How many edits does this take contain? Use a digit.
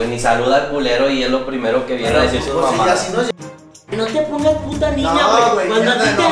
1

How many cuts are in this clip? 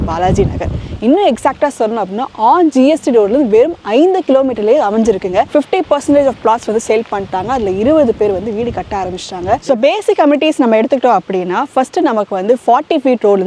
2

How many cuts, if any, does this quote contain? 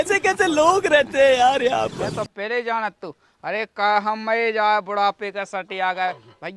1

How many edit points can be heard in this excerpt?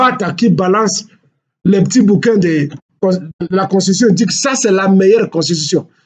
0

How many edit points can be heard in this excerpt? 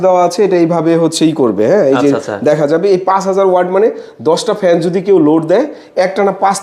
0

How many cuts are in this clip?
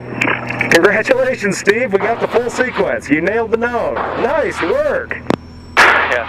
0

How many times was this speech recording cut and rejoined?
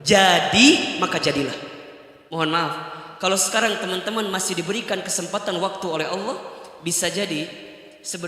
1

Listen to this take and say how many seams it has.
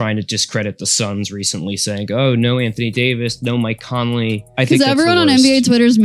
1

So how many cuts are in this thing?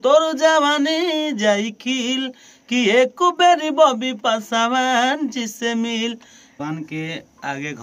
1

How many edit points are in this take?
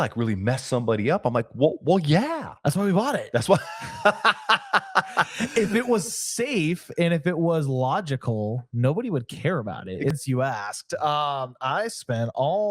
1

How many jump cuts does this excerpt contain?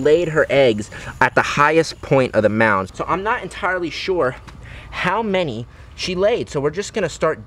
1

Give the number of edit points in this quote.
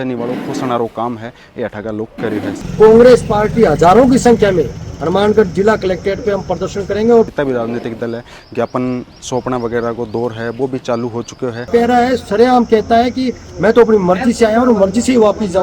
3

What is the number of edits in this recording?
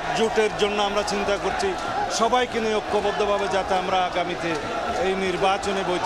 0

